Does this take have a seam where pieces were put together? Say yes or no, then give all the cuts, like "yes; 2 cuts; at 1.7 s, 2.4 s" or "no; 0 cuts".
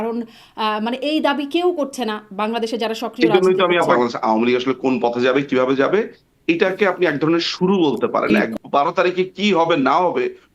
yes; 2 cuts; at 3.9 s, 8.4 s